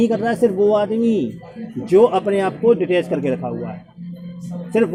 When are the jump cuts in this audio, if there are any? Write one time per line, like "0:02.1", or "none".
none